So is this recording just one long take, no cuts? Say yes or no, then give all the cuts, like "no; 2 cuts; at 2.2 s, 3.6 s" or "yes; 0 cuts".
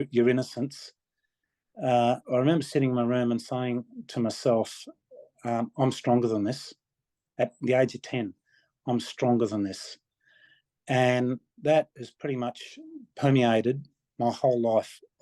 yes; 0 cuts